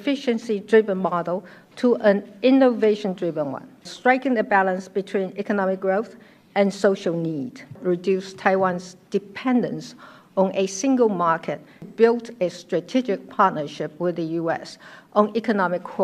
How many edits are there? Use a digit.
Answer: 3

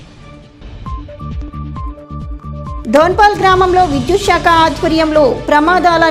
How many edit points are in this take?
1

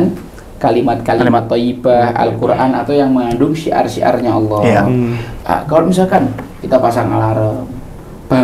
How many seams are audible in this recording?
1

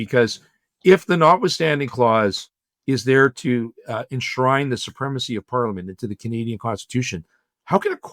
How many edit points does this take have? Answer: 0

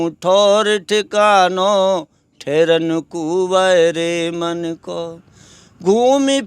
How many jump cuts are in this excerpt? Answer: 0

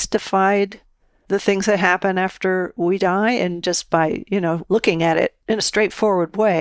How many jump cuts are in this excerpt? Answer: 2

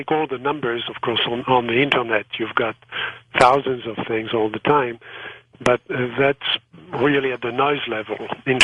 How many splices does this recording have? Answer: 1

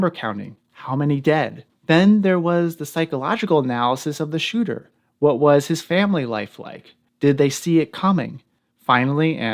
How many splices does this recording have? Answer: 1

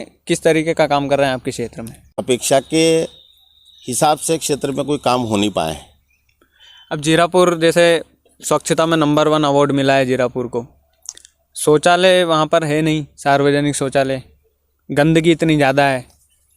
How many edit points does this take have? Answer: 1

